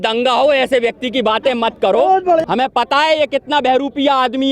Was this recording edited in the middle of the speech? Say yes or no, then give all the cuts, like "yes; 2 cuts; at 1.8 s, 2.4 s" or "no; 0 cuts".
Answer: yes; 1 cut; at 2.4 s